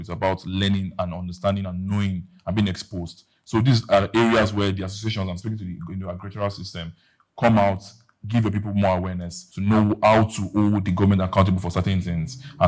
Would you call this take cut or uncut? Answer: uncut